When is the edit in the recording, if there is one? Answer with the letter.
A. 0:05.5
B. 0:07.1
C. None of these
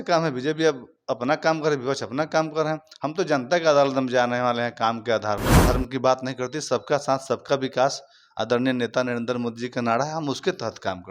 A